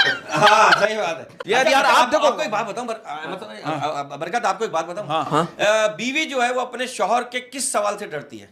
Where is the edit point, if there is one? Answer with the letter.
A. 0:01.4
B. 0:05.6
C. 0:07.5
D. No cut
A